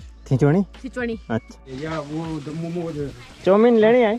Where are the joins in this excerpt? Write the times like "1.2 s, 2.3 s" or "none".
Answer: 1.5 s